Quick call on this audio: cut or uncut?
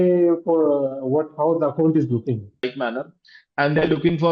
cut